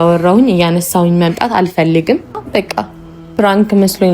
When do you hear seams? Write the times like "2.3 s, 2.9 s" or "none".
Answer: 2.4 s